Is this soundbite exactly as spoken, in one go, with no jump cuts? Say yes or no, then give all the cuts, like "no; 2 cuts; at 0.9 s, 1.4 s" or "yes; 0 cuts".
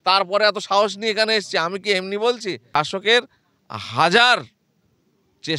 no; 1 cut; at 2.6 s